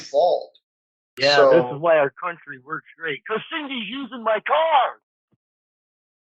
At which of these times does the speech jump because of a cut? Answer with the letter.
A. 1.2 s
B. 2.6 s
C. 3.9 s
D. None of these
A